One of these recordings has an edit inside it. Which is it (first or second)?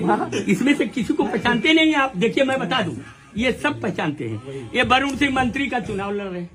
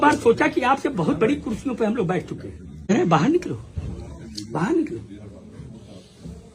second